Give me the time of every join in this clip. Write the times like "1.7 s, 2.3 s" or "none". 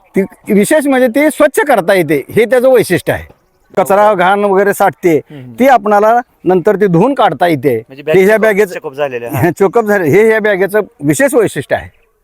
3.7 s